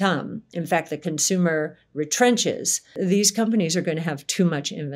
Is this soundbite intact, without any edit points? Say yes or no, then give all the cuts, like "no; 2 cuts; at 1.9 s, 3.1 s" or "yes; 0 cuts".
no; 1 cut; at 2.9 s